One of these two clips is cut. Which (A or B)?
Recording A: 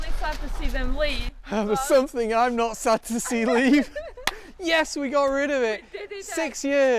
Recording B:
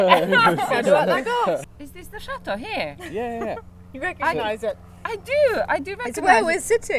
B